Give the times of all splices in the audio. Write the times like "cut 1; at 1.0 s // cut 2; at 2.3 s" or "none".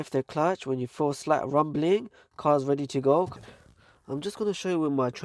cut 1; at 3.3 s